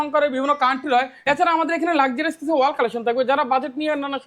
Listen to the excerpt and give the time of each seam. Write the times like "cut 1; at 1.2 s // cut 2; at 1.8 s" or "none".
cut 1; at 1.1 s

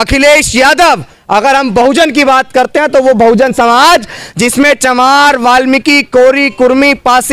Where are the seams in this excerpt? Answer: none

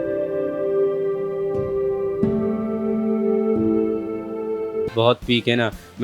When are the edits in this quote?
none

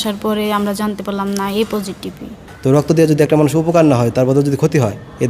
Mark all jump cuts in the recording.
cut 1; at 2.9 s

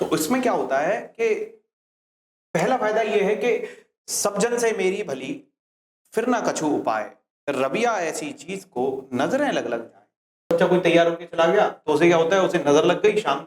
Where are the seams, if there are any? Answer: cut 1; at 10.5 s

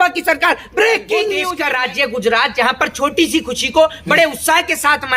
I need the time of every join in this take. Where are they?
cut 1; at 1.5 s

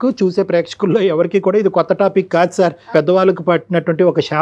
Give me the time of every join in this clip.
cut 1; at 2.9 s

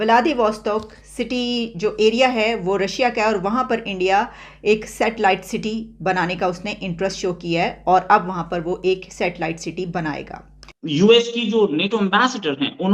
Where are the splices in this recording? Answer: cut 1; at 10.7 s

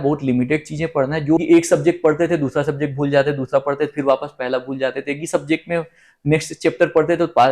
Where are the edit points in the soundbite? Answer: cut 1; at 1.4 s

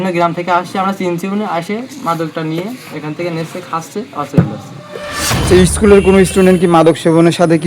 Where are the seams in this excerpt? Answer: cut 1; at 5.3 s

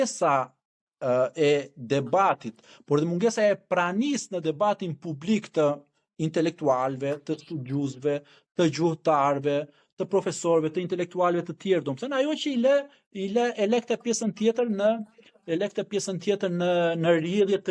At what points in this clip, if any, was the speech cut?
none

